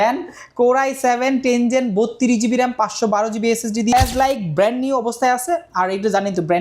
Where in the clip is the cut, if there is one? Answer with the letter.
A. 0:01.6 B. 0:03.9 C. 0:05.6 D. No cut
B